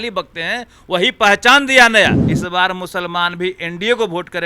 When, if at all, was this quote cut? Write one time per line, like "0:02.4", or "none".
0:02.3